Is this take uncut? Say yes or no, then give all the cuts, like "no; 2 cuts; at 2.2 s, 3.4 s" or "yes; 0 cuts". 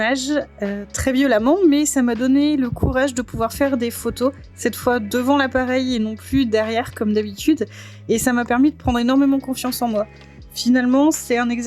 yes; 0 cuts